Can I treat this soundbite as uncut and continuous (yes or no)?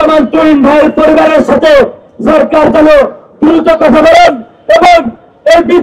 yes